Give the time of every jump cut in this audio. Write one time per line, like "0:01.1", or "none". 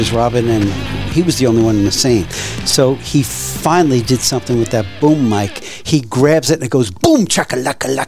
none

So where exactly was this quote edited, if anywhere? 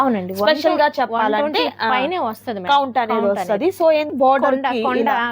0:04.1

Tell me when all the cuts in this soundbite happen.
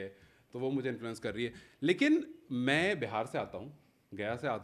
none

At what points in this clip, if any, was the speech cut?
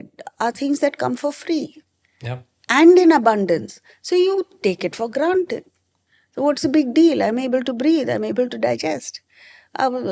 none

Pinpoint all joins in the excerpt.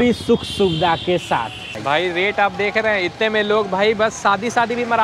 0:01.7

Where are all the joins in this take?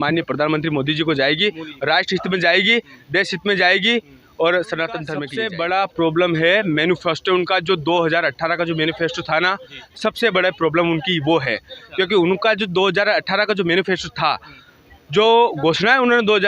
0:05.2

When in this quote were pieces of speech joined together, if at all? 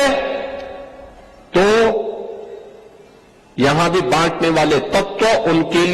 none

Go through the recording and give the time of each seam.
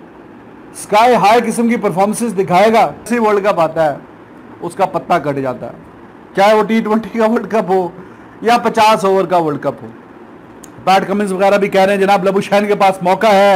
0:03.1

